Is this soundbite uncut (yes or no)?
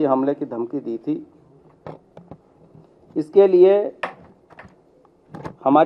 yes